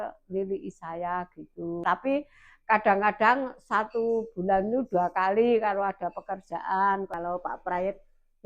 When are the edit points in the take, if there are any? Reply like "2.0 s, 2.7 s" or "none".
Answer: 1.8 s, 7.1 s